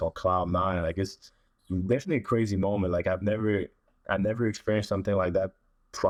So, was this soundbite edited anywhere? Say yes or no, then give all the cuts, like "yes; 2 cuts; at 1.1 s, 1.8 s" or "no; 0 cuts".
no; 0 cuts